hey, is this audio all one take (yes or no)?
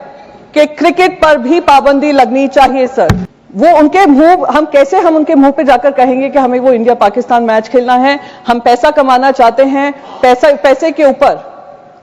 no